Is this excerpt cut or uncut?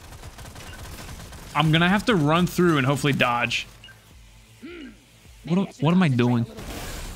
uncut